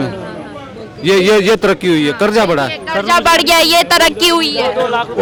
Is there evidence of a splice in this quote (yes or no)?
no